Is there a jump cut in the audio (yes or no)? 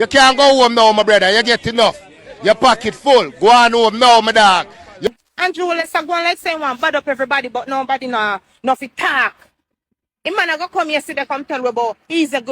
yes